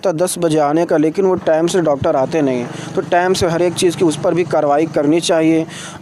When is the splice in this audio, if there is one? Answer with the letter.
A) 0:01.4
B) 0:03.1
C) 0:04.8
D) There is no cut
D